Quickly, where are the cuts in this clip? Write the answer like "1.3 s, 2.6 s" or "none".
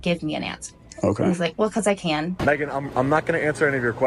2.4 s